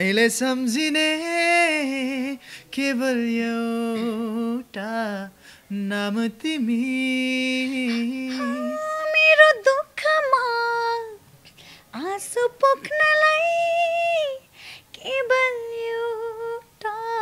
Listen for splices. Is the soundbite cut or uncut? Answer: uncut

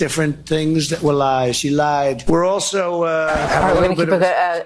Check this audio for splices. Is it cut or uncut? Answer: cut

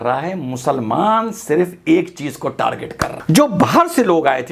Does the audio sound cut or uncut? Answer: cut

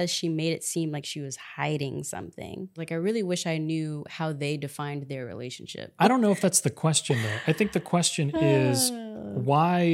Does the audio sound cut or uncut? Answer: cut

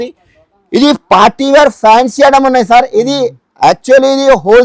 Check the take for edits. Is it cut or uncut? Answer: uncut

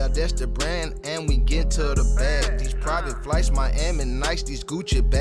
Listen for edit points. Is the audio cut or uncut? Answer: uncut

